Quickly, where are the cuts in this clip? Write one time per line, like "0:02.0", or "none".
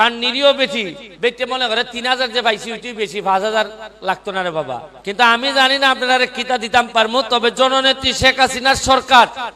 0:01.0
0:04.9